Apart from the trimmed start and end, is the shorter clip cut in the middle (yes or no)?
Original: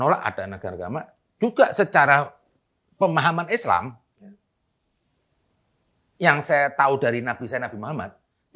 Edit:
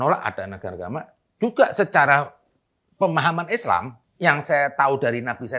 yes